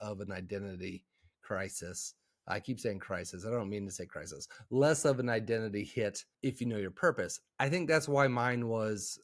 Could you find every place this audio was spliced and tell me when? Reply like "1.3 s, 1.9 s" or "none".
6.3 s